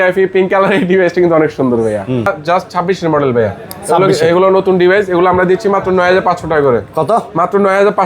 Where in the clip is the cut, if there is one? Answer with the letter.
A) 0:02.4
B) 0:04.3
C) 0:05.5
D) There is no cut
A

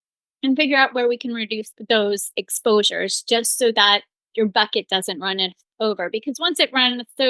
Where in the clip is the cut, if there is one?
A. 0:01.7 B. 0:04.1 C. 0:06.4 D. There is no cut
A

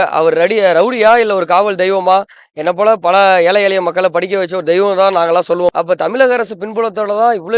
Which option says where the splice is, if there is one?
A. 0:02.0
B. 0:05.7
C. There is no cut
B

